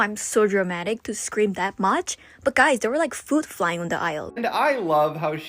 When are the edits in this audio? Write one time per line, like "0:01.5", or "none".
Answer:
0:04.3